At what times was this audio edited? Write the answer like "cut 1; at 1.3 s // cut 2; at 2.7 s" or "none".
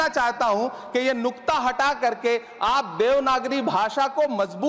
none